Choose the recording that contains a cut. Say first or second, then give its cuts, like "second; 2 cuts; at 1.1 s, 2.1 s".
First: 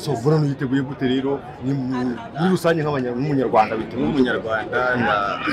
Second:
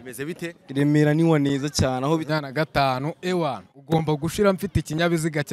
second; 1 cut; at 2.2 s